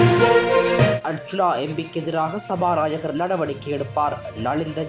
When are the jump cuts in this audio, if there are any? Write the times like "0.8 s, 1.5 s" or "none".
1.0 s